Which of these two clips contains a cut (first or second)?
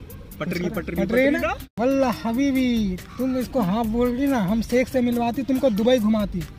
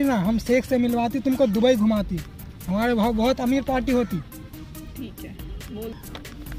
first